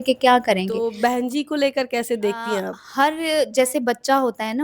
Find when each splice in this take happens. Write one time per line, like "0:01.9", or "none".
0:00.9
0:02.8